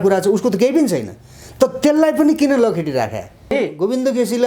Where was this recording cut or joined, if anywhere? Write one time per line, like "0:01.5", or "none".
0:03.4